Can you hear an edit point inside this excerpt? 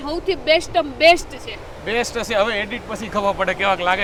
no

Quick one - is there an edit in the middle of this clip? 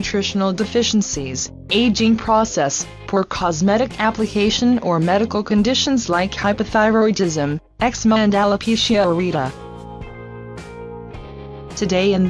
no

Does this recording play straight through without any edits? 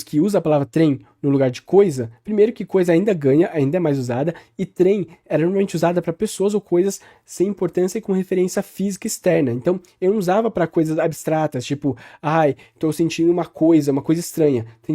yes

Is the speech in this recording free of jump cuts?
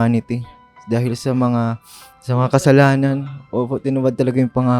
yes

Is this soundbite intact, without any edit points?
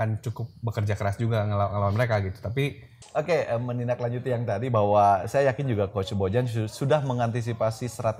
no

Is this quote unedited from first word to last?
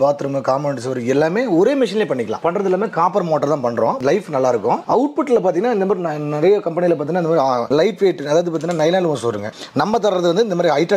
no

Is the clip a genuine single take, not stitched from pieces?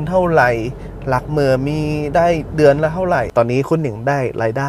no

